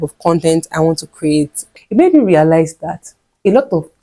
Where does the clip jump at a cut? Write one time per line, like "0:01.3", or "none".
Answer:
0:01.6

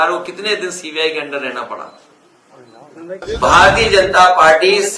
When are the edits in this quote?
0:03.3

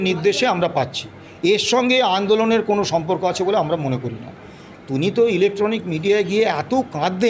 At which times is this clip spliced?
0:04.7

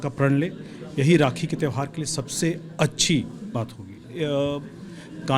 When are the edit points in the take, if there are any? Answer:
0:04.0

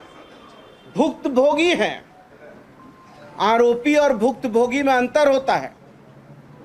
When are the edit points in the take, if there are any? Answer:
none

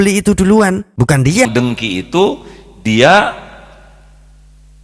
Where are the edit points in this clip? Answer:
0:01.5

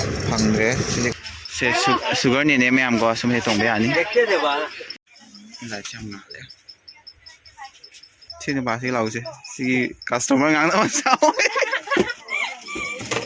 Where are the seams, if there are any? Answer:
0:01.1
0:05.0
0:08.2

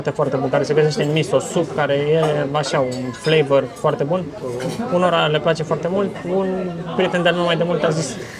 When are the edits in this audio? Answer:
none

